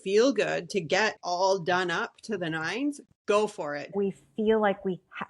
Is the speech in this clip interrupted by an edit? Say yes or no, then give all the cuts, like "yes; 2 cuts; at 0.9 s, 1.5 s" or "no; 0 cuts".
yes; 1 cut; at 3.9 s